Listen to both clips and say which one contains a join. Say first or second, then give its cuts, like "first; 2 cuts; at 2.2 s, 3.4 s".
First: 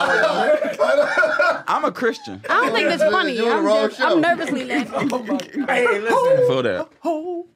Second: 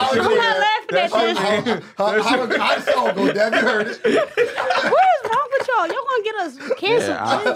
first; 1 cut; at 5.7 s